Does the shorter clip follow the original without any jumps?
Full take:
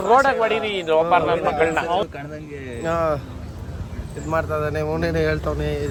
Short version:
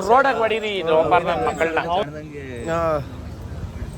no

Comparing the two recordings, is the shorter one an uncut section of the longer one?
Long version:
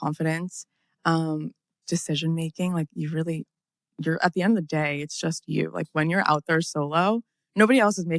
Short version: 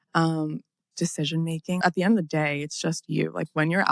no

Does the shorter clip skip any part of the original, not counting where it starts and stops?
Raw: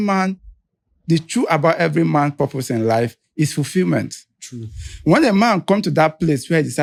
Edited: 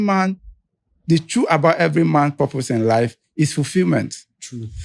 no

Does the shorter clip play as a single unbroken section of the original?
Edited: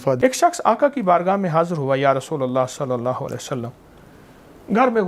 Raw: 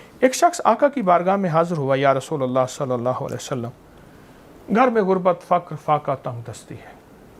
yes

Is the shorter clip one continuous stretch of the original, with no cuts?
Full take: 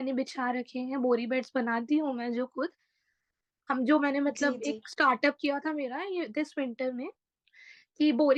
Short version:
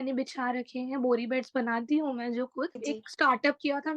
no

